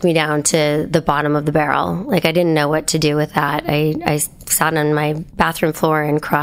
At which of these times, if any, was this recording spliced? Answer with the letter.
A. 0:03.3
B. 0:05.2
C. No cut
B